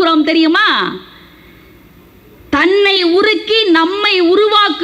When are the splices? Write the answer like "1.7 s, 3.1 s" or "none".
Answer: none